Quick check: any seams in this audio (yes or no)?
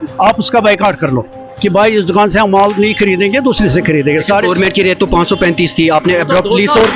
no